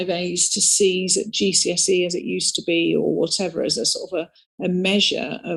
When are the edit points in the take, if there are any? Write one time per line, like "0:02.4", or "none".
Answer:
none